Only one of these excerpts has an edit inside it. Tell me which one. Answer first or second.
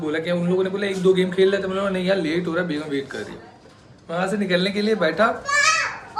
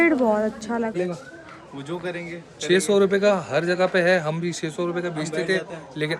second